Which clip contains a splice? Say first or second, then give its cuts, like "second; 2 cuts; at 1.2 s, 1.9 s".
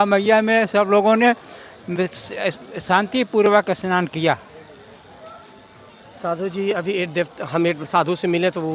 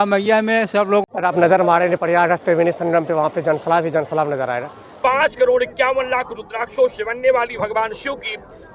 second; 2 cuts; at 1.0 s, 4.8 s